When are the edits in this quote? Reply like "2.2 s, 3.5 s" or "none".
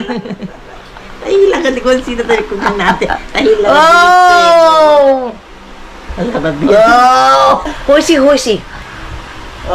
7.7 s, 8.8 s